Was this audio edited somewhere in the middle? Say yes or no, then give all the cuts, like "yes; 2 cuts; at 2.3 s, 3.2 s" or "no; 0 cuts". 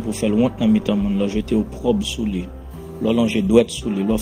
no; 0 cuts